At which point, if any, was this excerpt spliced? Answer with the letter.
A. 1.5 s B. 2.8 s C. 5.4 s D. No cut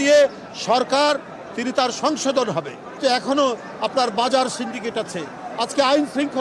B